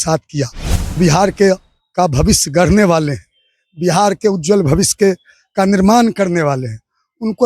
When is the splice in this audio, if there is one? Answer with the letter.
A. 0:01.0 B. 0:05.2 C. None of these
A